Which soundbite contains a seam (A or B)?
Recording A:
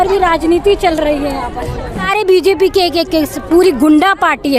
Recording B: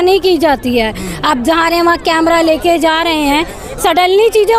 A